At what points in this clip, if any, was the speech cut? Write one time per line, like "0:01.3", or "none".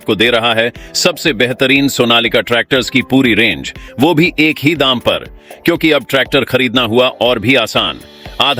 none